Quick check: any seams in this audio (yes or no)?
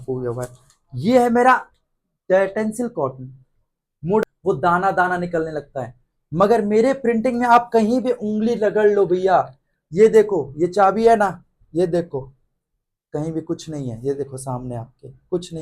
yes